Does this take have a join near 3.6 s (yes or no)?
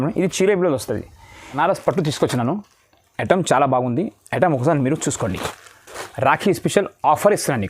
no